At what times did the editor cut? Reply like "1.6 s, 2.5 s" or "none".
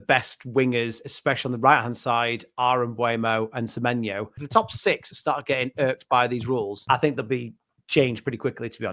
4.4 s, 6.8 s